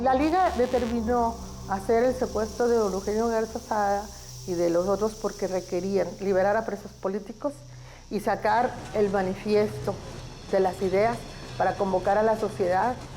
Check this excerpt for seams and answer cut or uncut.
uncut